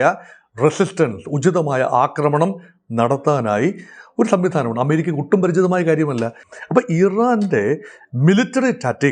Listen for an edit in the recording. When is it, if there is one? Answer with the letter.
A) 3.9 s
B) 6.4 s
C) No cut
B